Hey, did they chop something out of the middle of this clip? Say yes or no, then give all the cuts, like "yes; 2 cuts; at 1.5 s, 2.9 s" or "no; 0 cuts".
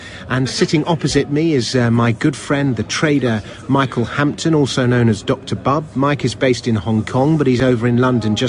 yes; 1 cut; at 4.5 s